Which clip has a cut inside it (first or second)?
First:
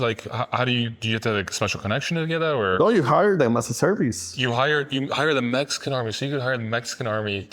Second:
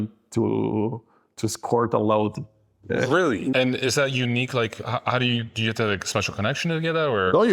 second